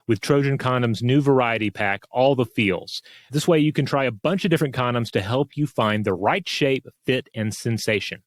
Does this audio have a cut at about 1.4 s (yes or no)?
no